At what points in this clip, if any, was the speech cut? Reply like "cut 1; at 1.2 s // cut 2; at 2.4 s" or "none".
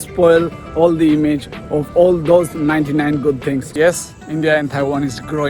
cut 1; at 3.7 s